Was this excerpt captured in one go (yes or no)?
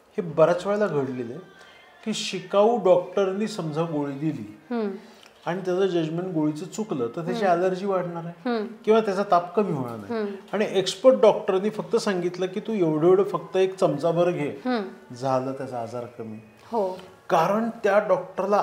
yes